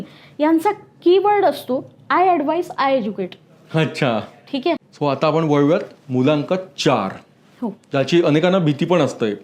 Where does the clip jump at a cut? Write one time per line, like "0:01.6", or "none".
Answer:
0:04.9